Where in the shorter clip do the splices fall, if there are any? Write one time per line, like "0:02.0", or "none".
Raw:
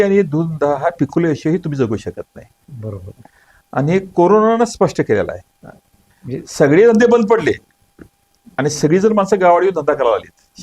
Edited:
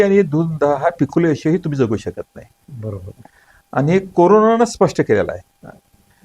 none